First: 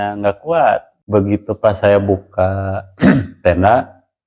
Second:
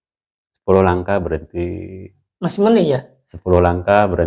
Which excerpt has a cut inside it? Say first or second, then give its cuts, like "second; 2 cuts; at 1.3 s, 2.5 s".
first; 1 cut; at 0.9 s